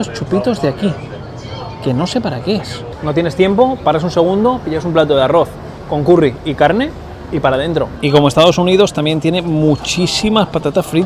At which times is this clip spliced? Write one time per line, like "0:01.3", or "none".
0:02.9
0:07.9